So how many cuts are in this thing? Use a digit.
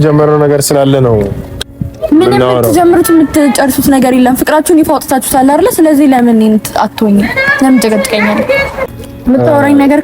1